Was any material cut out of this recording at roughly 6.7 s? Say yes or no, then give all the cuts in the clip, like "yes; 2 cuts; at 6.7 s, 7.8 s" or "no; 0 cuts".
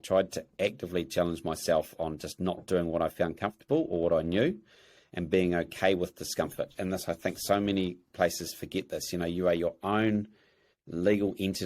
yes; 1 cut; at 6.7 s